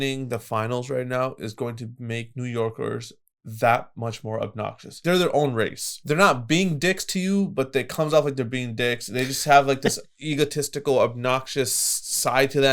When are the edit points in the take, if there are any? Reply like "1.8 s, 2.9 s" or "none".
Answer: 5.0 s, 5.9 s

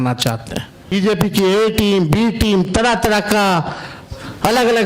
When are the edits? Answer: 0.9 s

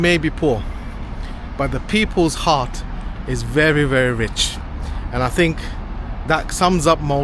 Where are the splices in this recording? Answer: none

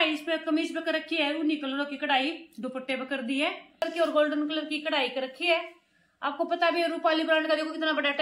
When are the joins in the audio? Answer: 3.8 s

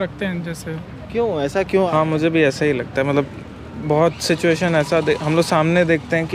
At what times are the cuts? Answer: 1.9 s

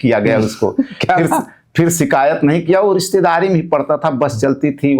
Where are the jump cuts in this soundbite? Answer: none

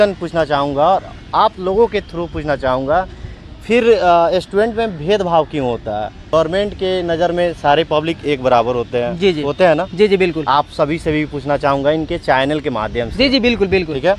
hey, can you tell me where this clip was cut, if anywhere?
6.3 s

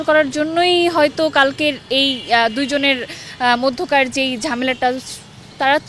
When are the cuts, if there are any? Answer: none

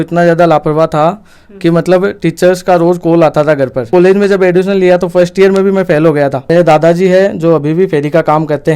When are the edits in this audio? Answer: 3.9 s, 6.4 s

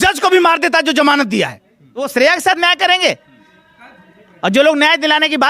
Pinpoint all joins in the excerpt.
2.1 s

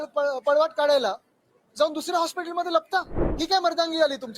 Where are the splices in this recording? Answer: 3.2 s

